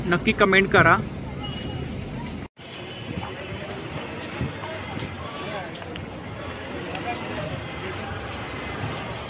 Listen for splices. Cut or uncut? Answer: uncut